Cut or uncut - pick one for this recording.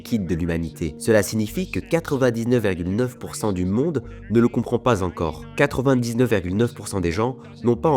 cut